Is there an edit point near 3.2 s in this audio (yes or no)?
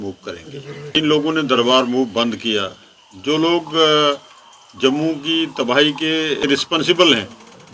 no